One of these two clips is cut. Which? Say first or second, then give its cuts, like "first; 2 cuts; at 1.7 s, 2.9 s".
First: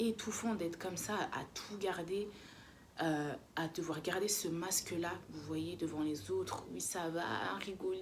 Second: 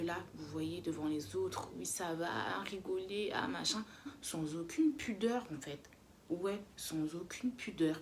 second; 1 cut; at 4.2 s